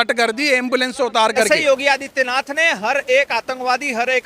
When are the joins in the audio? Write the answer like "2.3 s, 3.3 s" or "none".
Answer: 1.5 s